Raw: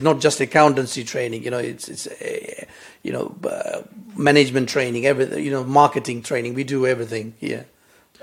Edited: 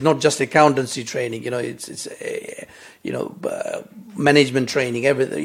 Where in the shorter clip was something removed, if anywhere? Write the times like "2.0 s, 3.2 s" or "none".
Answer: none